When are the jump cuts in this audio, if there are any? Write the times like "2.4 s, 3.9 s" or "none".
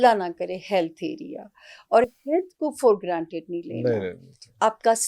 none